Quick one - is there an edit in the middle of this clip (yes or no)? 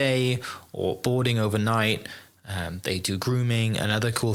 no